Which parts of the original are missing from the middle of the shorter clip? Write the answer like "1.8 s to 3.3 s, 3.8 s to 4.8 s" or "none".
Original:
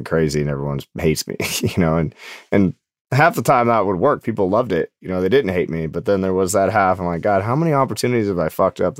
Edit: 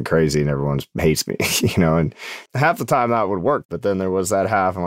2.3 s to 2.9 s, 4.3 s to 5.9 s